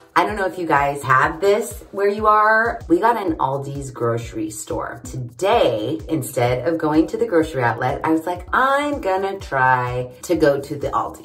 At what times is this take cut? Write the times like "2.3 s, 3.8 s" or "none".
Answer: 2.8 s, 5.0 s, 8.4 s